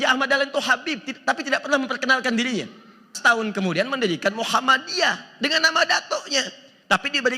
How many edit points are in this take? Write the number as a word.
one